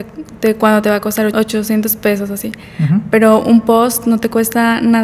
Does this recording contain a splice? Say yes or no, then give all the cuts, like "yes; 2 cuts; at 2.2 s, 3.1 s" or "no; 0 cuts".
yes; 1 cut; at 1.3 s